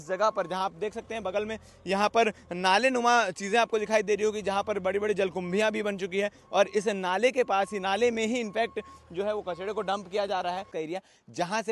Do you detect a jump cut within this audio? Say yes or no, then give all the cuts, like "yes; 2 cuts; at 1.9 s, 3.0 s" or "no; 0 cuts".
yes; 1 cut; at 10.7 s